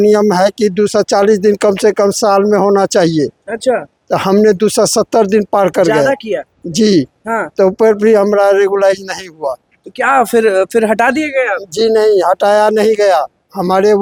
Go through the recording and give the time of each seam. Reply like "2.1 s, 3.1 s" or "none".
none